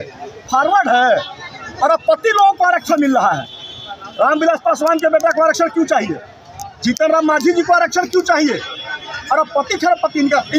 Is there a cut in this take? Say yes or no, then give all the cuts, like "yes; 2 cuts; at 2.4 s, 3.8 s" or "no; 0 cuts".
no; 0 cuts